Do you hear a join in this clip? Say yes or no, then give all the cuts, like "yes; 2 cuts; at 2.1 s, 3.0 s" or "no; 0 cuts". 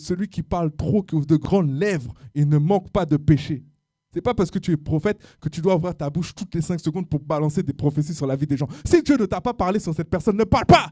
no; 0 cuts